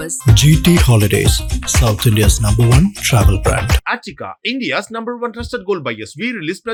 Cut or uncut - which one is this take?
uncut